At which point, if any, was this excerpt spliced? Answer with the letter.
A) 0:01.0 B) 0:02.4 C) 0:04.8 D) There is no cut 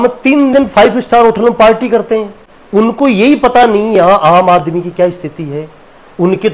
D